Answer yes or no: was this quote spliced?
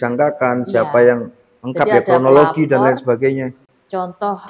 yes